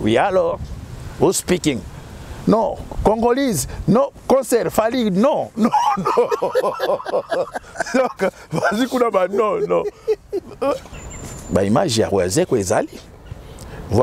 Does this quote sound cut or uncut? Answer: cut